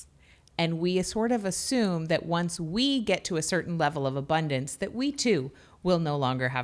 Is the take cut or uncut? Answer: uncut